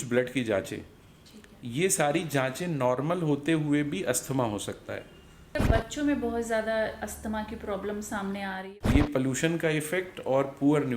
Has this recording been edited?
yes; 2 cuts; at 5.6 s, 8.6 s

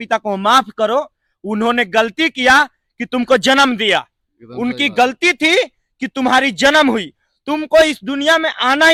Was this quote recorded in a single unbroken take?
yes; 0 cuts

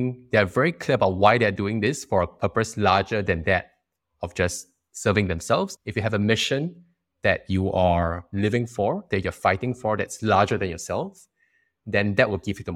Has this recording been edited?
yes; 1 cut; at 5.7 s

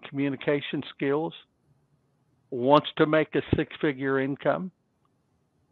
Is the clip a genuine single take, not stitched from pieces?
yes; 0 cuts

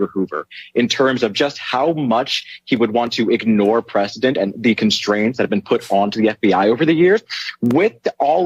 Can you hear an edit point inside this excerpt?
no; 0 cuts

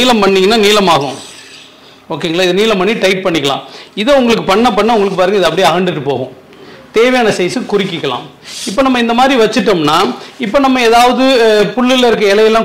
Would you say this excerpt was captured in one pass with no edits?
yes; 0 cuts

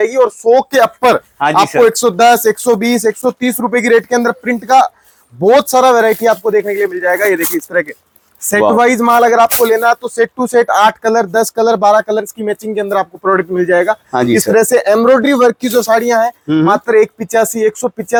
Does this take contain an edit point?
no; 0 cuts

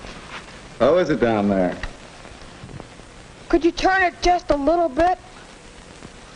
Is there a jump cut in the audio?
yes; 1 cut; at 1.1 s

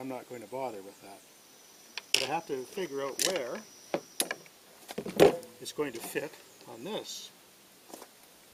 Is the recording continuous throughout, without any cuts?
yes; 0 cuts

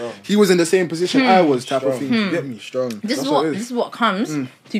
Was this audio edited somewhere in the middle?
no; 0 cuts

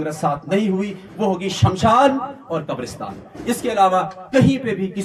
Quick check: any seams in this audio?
no; 0 cuts

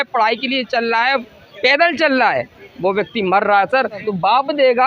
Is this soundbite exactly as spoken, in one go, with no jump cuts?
no; 2 cuts; at 1.2 s, 4.1 s

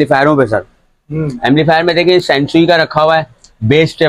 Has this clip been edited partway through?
no; 0 cuts

